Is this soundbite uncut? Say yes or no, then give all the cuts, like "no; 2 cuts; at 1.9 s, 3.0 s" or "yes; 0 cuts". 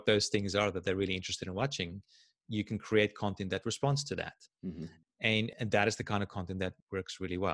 yes; 0 cuts